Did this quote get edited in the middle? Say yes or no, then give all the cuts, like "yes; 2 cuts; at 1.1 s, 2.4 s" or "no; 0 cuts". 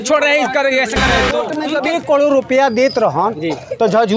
yes; 1 cut; at 1.6 s